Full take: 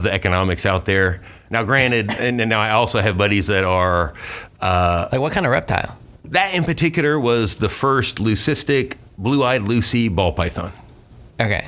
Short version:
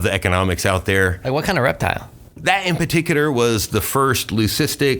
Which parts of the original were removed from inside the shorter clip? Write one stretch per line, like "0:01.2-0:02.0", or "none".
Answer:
0:01.2-0:05.1